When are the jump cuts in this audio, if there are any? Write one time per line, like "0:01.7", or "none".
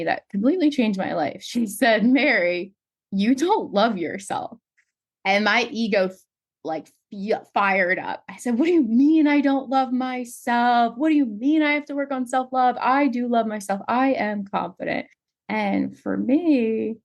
none

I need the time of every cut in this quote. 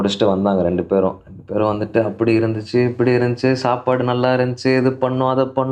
none

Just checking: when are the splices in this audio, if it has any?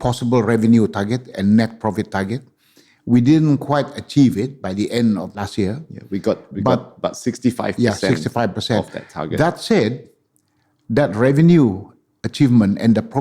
0:05.5

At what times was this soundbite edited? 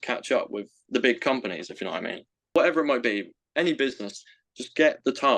0:02.5

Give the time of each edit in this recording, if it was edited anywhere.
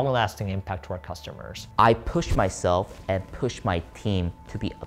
0:01.5

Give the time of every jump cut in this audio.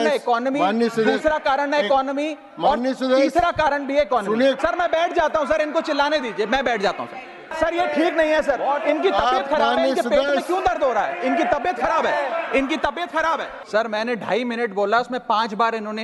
0:04.6
0:07.5
0:13.5

